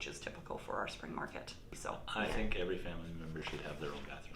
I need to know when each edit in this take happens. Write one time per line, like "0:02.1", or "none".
0:01.6

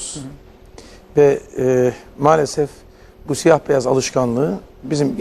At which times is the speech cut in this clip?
none

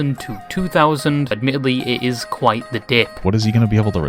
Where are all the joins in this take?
0:01.4
0:03.2

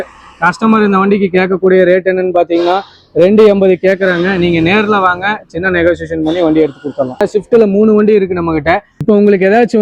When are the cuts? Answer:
0:07.2
0:09.0

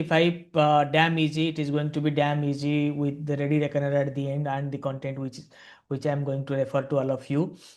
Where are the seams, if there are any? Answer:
none

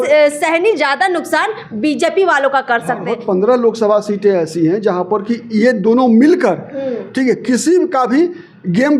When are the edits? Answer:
0:03.1

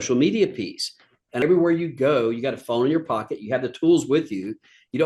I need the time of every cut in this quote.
0:01.4

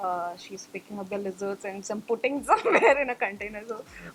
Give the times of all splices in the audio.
none

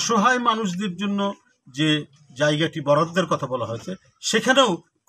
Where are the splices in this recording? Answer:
none

